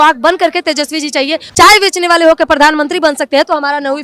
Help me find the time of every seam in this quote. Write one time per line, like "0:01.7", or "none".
0:01.4